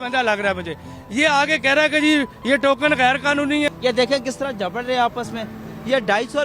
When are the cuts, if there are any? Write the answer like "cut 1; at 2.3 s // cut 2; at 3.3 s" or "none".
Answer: cut 1; at 3.7 s